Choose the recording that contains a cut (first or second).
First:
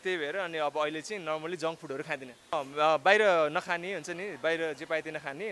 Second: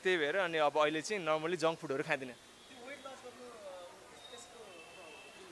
first